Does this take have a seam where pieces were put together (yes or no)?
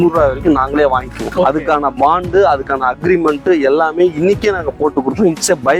no